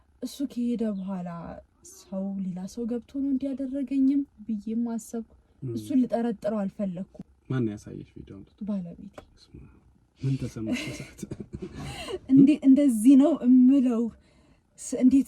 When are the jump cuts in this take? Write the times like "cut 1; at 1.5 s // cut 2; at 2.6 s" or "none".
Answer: cut 1; at 7.3 s